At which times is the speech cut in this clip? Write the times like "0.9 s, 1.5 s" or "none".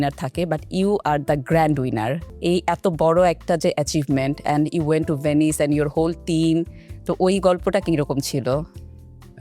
2.3 s